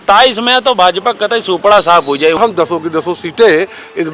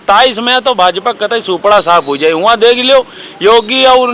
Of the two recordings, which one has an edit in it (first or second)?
first